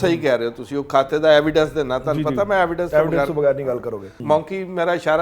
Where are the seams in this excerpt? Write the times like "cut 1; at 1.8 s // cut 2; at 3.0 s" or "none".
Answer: cut 1; at 4.1 s